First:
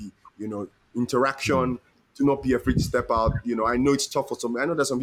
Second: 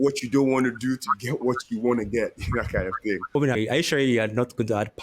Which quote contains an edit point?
second; 1 cut; at 3.6 s

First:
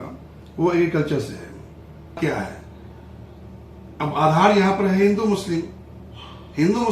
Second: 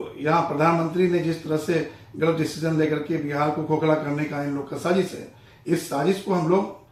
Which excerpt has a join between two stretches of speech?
first; 1 cut; at 2.2 s

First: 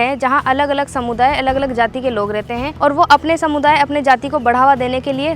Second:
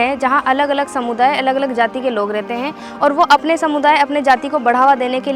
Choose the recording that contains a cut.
first; 1 cut; at 2.7 s

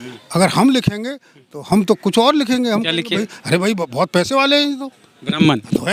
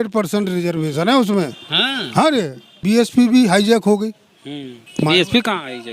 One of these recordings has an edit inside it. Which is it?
second; 1 cut; at 2.8 s

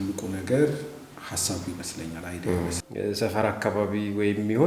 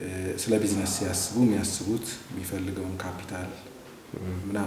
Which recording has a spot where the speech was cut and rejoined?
first; 1 cut; at 2.8 s

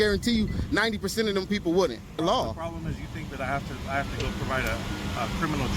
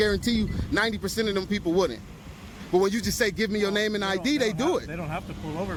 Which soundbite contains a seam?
first; 1 cut; at 2.2 s

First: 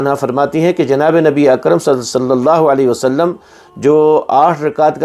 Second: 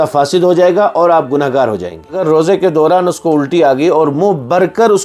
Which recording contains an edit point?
second; 1 cut; at 2.2 s

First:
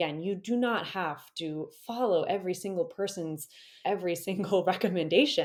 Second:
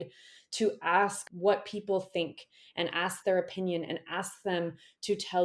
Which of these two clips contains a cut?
second; 1 cut; at 1.3 s

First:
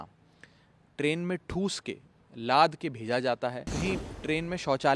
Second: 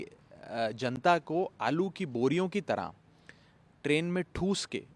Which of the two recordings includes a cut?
first; 1 cut; at 3.7 s

